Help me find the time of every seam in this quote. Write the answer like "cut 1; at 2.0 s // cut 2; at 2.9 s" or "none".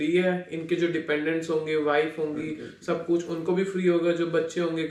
none